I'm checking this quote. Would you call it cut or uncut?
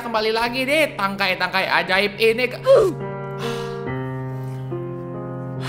uncut